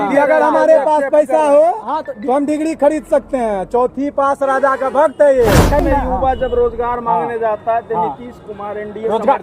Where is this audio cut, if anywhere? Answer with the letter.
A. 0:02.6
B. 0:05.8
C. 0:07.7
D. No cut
B